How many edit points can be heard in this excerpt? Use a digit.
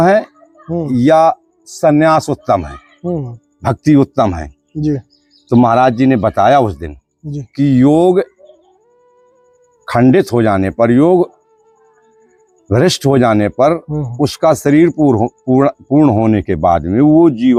0